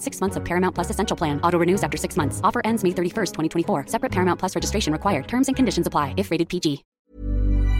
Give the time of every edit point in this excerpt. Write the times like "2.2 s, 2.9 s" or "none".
6.9 s